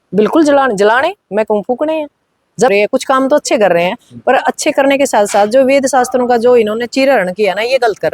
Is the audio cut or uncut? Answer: cut